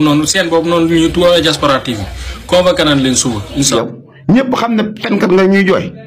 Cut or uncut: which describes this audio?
cut